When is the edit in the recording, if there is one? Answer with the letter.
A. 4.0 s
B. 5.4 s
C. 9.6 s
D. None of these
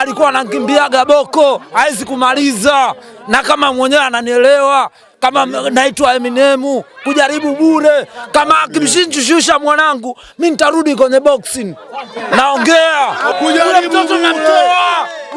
D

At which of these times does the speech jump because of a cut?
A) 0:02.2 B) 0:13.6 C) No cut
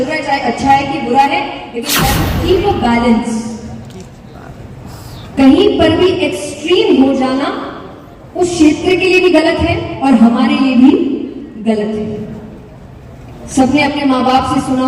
A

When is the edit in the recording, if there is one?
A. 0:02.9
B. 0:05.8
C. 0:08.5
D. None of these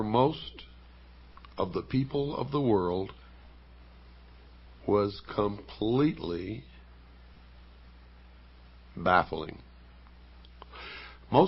A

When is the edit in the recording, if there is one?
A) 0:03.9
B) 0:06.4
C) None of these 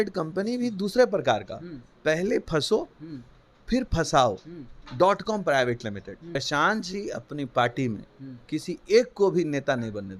B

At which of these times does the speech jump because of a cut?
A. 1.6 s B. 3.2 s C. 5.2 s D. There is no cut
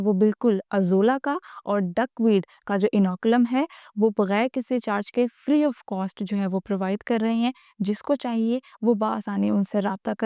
D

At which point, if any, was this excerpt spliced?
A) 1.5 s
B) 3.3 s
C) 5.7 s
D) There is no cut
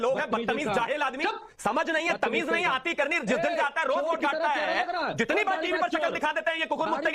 D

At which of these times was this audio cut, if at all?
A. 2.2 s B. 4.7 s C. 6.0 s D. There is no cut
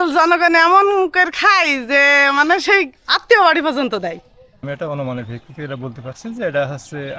B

